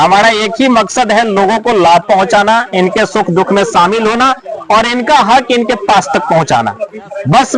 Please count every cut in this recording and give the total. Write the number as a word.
zero